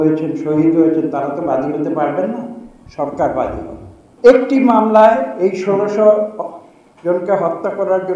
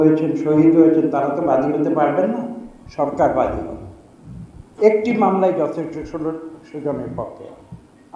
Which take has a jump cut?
first; 1 cut; at 4.0 s

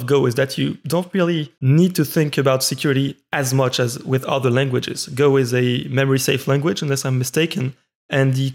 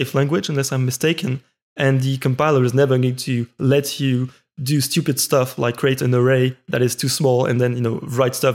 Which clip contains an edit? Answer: first; 1 cut; at 1.5 s

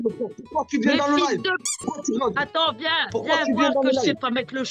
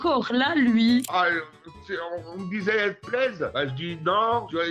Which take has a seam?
second; 1 cut; at 1.0 s

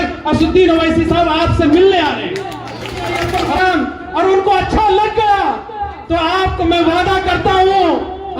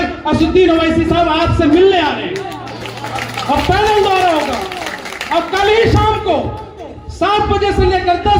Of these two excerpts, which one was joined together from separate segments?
first; 1 cut; at 3.1 s

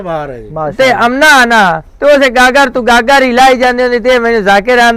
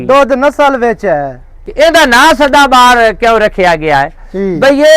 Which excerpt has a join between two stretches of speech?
second; 1 cut; at 1.7 s

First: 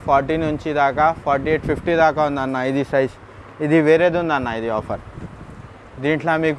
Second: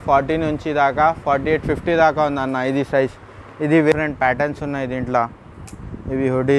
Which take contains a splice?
second; 1 cut; at 3.9 s

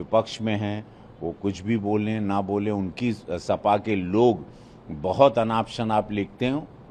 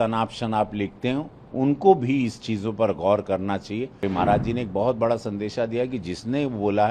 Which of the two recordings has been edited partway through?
second; 1 cut; at 4.0 s

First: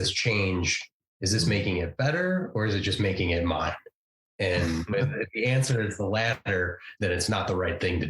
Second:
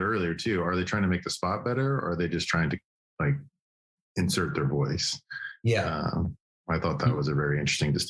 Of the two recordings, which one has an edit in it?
first; 2 cuts; at 4.9 s, 6.9 s

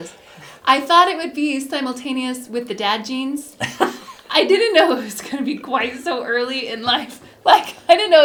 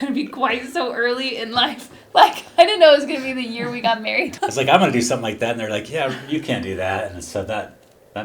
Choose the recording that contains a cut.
second; 1 cut; at 4.3 s

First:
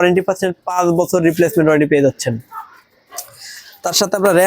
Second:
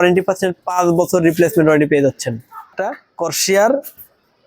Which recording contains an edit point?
second; 1 cut; at 2.8 s

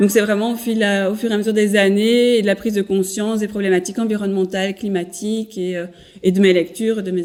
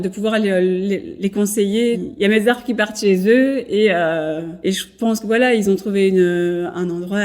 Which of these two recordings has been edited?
second; 3 cuts; at 1.1 s, 2.1 s, 4.5 s

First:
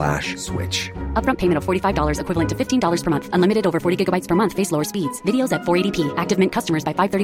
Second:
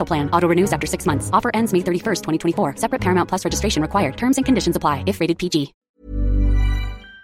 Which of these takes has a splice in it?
second; 1 cut; at 5.7 s

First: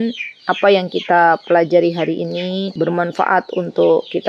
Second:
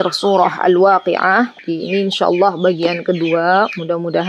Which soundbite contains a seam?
second; 1 cut; at 1.6 s

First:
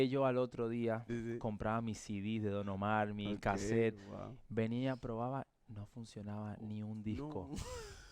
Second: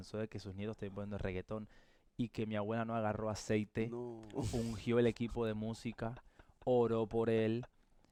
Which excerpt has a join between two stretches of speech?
first; 1 cut; at 1.1 s

